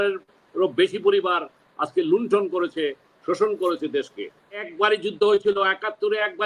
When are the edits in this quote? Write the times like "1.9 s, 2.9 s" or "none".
4.7 s